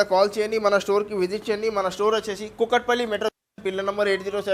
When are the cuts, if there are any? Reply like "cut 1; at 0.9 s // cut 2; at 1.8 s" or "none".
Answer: none